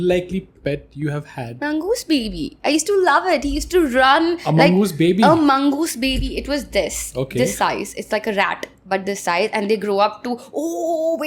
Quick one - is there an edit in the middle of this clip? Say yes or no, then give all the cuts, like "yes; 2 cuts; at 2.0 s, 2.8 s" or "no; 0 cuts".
no; 0 cuts